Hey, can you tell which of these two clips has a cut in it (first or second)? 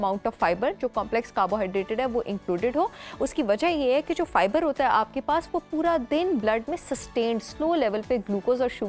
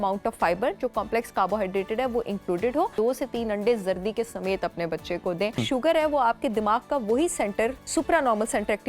second